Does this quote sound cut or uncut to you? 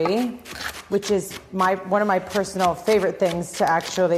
uncut